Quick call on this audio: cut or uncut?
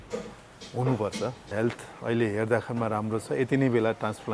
cut